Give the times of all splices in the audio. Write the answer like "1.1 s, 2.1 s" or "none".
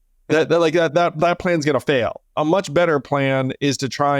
2.3 s